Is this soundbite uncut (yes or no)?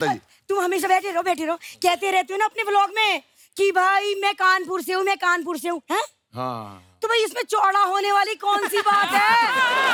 yes